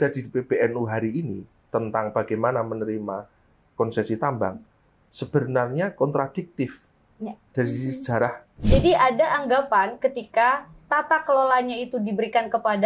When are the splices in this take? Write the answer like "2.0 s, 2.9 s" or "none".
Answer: 8.5 s